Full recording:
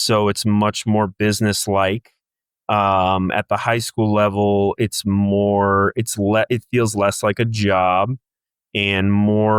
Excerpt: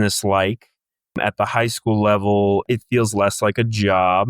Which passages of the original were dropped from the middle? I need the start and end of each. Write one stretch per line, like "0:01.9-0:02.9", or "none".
0:02.6-0:03.3
0:04.8-0:06.5